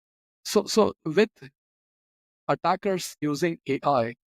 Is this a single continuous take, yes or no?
no